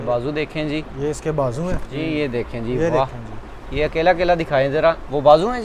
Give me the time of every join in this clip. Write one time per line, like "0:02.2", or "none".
0:01.9